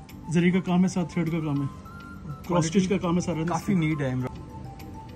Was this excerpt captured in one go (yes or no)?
no